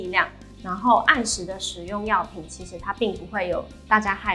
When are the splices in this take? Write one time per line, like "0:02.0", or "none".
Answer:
none